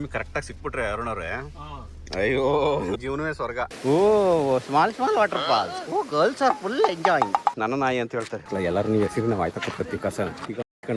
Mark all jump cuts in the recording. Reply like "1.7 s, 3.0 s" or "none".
3.7 s, 7.4 s